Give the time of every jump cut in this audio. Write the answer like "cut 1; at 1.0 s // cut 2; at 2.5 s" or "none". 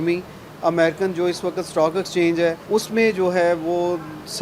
cut 1; at 2.6 s

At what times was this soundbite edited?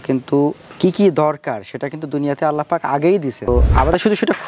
cut 1; at 3.5 s

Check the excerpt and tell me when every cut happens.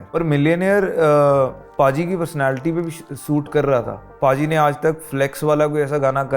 cut 1; at 4.0 s

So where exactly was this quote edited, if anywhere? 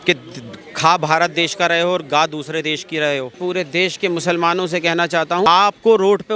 cut 1; at 3.4 s // cut 2; at 5.5 s

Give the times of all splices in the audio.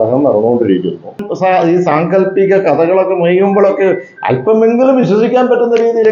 cut 1; at 1.3 s

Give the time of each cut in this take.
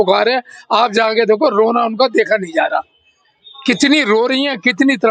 none

